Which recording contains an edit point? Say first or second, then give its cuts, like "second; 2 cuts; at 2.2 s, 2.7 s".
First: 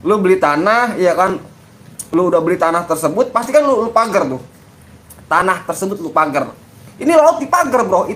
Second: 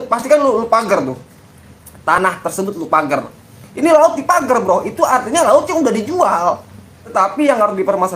second; 1 cut; at 7.1 s